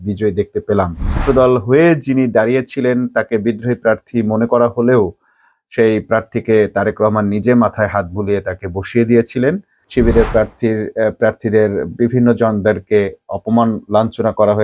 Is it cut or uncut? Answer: cut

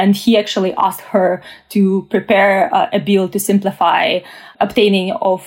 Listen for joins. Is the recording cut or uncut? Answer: cut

